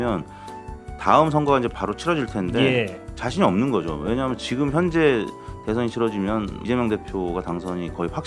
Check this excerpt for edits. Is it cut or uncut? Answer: uncut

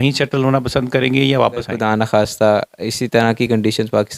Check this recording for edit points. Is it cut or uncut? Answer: cut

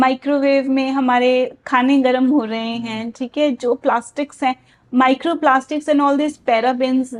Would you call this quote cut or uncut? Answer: uncut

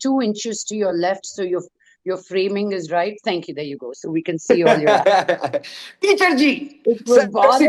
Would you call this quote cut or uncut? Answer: uncut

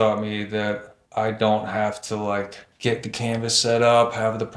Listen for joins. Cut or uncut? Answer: cut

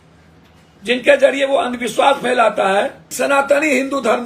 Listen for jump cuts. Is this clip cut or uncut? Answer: cut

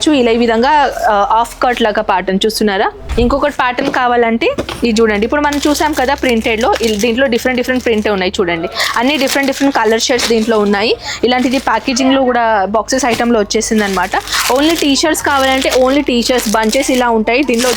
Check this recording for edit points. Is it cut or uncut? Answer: cut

